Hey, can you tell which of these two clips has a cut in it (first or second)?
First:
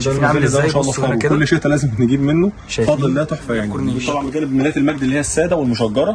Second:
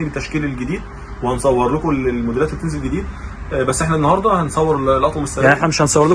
first